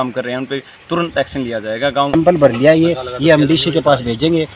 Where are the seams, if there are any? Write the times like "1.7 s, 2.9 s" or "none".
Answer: 2.1 s